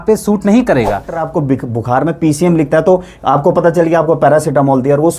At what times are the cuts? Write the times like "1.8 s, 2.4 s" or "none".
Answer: 1.2 s